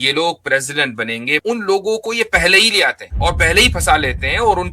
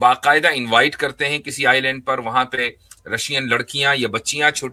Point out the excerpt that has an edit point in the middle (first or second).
first